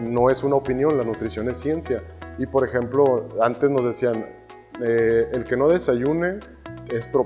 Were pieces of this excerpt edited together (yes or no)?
no